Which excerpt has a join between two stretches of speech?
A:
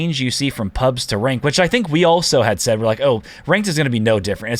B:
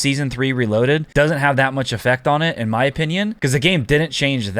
B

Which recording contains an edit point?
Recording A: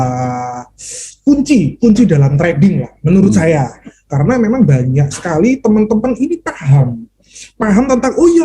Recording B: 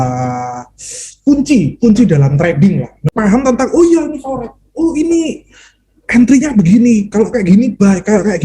B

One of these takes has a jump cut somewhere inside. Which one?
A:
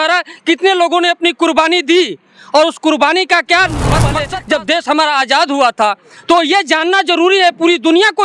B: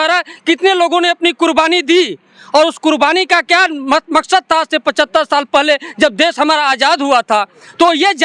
A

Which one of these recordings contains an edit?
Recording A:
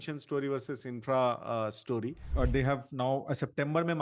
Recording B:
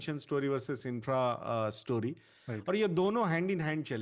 A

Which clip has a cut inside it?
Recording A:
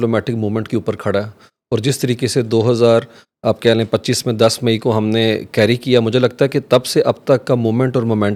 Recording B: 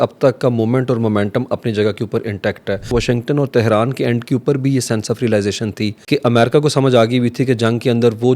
B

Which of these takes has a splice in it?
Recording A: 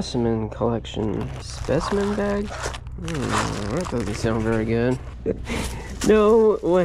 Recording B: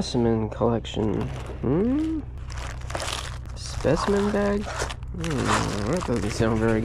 A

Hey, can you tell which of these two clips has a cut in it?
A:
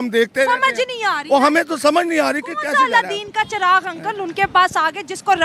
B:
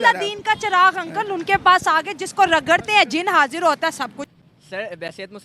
B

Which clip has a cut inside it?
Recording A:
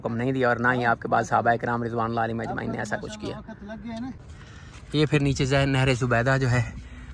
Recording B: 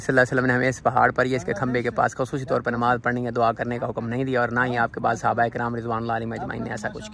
A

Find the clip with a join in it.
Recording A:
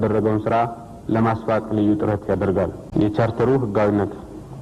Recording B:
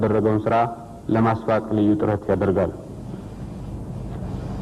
A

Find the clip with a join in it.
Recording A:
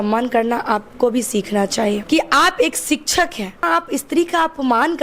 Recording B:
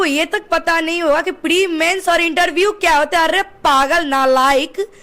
A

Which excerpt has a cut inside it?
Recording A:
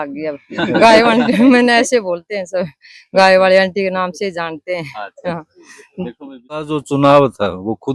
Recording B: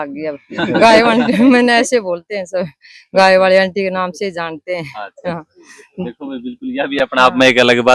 A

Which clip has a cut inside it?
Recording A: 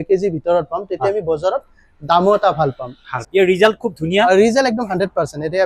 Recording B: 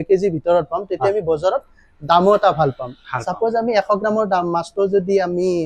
A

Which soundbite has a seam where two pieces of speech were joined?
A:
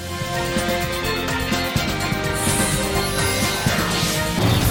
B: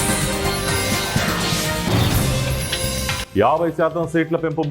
B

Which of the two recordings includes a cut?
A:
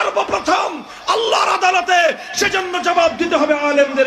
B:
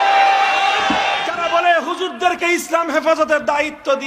B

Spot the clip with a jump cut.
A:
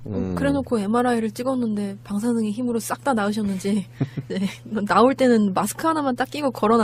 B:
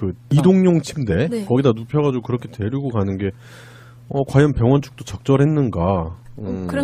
B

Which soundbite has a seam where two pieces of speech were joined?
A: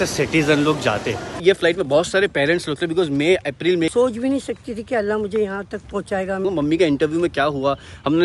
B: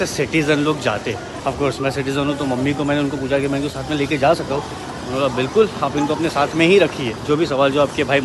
A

